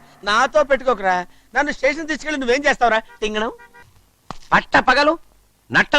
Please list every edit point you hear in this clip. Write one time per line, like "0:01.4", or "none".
0:03.8